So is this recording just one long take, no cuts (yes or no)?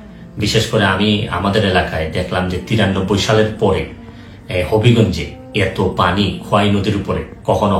yes